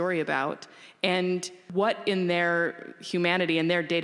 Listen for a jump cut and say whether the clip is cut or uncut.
cut